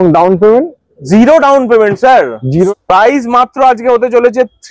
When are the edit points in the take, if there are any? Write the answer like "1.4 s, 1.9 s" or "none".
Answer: 2.7 s

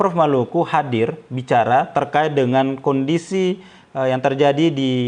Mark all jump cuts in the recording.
none

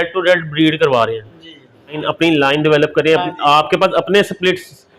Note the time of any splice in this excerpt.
2.0 s

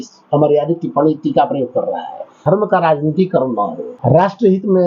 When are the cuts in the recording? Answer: 2.4 s, 3.9 s

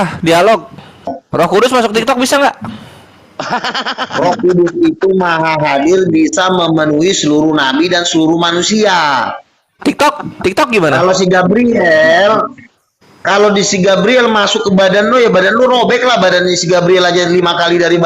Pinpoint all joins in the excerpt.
1.2 s

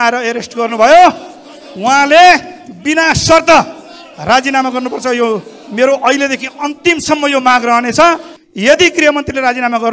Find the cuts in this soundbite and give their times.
8.3 s

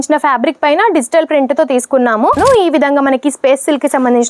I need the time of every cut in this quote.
2.4 s

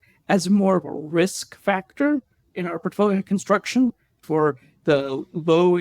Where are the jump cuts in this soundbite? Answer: 4.2 s

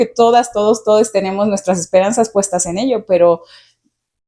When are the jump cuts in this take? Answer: none

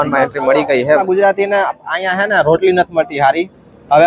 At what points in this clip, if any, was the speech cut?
1.0 s

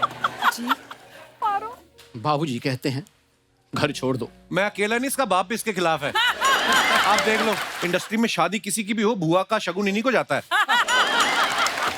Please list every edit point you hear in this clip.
7.7 s

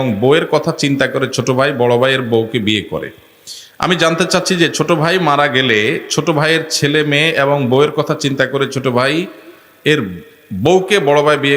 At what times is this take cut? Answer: none

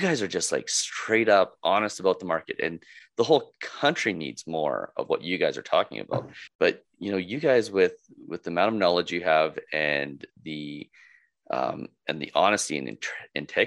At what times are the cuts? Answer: 6.4 s

